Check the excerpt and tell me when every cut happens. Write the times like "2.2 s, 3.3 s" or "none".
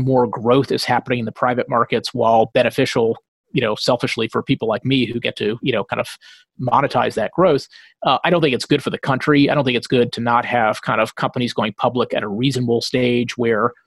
none